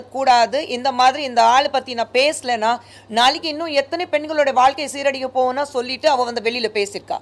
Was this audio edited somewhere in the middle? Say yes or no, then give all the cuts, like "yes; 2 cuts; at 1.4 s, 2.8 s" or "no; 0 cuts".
no; 0 cuts